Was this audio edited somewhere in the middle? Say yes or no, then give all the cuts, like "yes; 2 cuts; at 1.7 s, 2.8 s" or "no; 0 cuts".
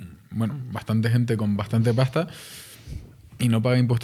no; 0 cuts